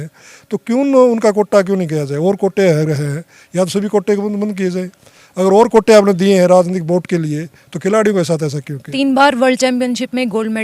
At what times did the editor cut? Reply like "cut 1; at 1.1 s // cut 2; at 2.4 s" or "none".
cut 1; at 8.9 s